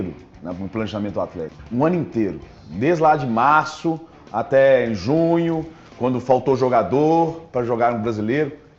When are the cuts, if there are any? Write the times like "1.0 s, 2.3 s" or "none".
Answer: 1.6 s